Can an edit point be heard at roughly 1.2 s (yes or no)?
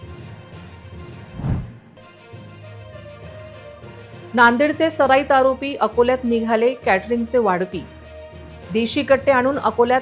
yes